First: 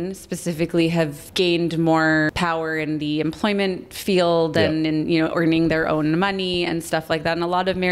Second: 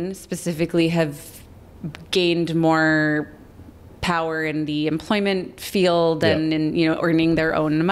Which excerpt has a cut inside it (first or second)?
first